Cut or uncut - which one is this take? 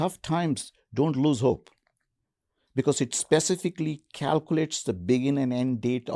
uncut